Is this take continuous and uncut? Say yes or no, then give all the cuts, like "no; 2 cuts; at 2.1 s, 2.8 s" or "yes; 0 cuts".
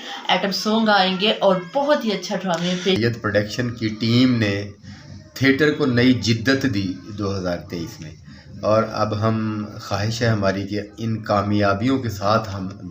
no; 1 cut; at 3.0 s